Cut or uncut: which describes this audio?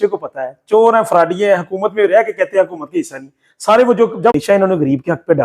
cut